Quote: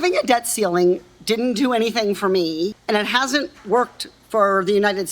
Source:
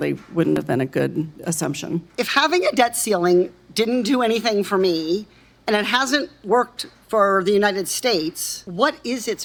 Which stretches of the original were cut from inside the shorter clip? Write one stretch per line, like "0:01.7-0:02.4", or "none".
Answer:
0:05.3-0:05.6